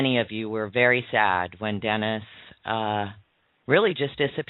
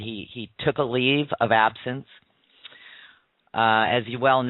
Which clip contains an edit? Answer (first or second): second